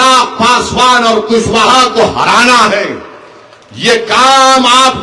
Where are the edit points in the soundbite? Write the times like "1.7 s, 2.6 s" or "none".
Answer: none